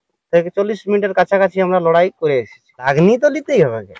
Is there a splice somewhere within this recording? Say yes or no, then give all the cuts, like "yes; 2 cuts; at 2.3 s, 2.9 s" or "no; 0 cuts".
yes; 1 cut; at 2.9 s